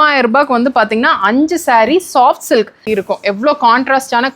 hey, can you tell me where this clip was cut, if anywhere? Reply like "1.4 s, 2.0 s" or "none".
2.8 s